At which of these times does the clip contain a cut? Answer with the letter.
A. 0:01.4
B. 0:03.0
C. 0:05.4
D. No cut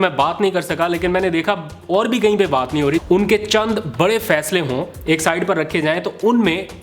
B